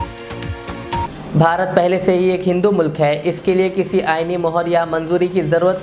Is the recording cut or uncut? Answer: uncut